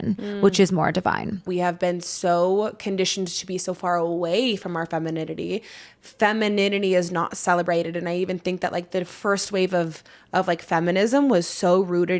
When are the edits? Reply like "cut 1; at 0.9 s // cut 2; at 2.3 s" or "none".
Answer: cut 1; at 1.4 s